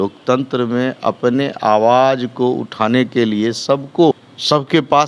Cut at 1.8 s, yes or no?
no